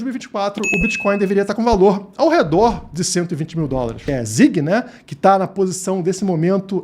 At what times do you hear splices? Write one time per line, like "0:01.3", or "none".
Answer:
0:04.0

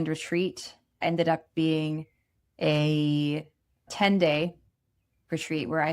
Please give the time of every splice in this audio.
0:01.0
0:03.9

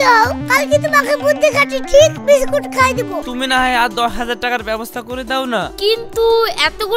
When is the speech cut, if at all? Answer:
0:03.2

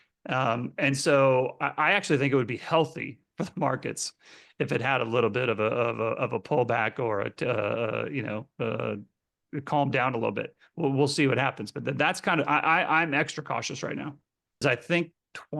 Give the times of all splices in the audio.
0:14.6

